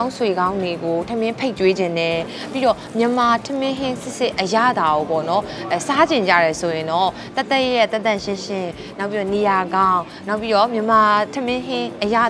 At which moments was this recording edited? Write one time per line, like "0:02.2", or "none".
none